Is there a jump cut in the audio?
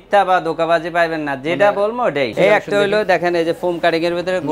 yes; 1 cut; at 2.3 s

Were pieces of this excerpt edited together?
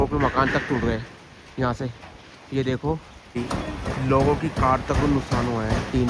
yes; 1 cut; at 3.3 s

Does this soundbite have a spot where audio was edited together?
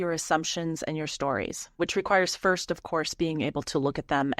yes; 1 cut; at 1.8 s

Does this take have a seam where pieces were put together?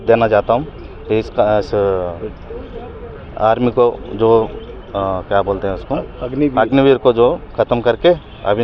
no; 0 cuts

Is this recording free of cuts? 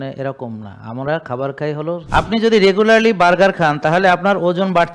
no; 1 cut; at 2.0 s

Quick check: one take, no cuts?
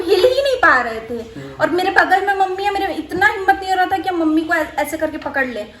yes; 0 cuts

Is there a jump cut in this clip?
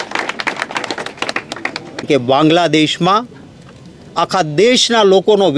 yes; 1 cut; at 2.1 s

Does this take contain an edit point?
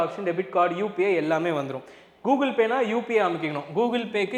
no; 0 cuts

